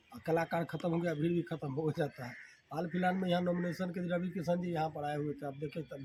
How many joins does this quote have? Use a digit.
0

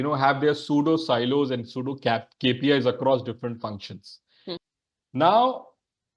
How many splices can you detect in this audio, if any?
1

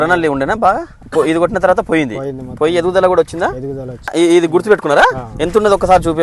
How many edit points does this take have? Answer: 2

